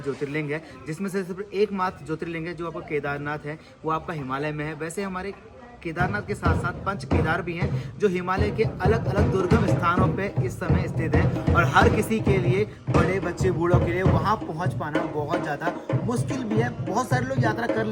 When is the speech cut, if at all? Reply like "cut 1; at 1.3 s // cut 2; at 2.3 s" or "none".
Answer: none